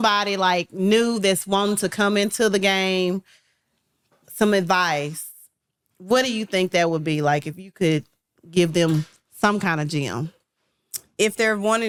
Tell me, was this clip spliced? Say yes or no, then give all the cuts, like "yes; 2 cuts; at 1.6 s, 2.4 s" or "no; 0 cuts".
no; 0 cuts